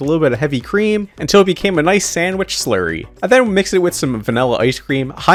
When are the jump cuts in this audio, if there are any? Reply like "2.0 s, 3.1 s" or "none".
none